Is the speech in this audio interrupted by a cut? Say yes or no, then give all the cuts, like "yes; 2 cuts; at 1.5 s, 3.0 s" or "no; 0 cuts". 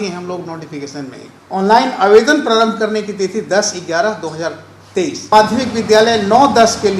yes; 2 cuts; at 1.3 s, 5.3 s